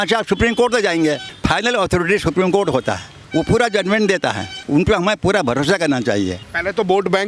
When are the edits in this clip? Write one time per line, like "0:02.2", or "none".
0:01.3
0:03.1
0:04.5
0:06.3